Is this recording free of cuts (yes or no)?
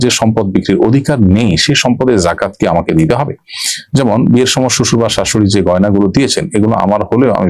yes